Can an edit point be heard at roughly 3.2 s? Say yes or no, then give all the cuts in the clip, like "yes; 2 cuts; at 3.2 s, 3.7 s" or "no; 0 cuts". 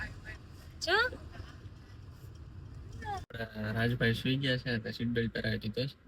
yes; 1 cut; at 3.2 s